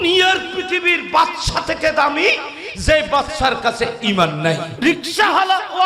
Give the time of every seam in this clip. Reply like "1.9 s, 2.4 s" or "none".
4.7 s